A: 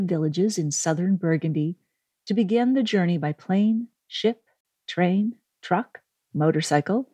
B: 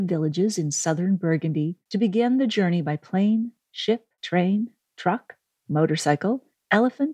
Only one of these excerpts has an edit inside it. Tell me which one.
B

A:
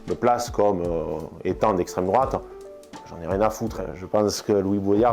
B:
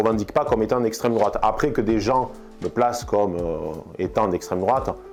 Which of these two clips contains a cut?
A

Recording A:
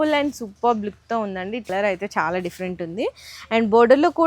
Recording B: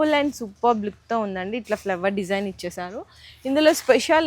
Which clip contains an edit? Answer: A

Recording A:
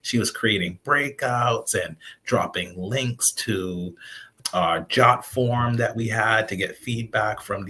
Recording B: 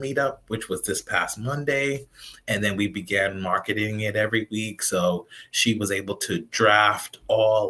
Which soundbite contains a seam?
A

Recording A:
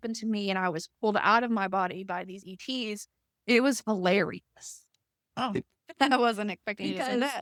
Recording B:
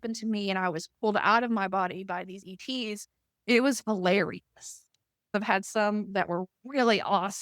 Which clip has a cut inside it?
B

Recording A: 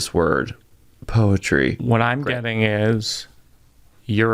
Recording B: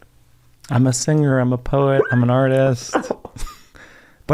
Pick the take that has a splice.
A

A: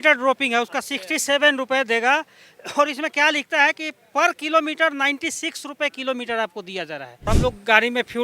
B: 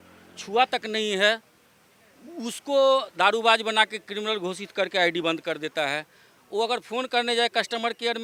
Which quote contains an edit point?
A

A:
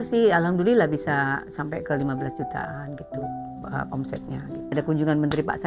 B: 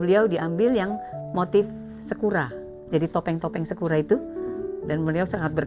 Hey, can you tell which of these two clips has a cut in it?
A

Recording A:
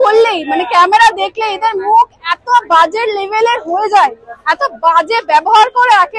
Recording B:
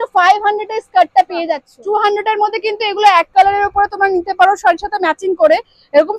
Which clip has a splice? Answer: B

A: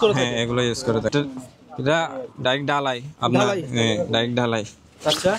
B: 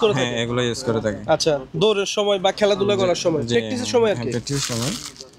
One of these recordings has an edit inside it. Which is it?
A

